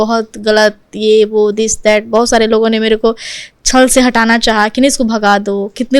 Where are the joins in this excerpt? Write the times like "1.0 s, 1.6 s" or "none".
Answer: none